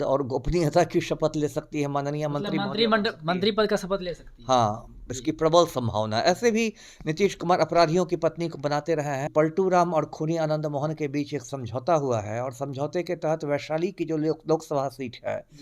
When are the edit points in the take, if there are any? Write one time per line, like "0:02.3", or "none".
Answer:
0:09.3